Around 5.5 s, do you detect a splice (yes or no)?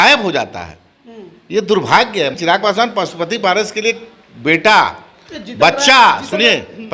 no